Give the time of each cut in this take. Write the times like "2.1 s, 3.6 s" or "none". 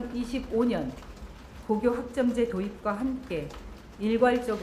none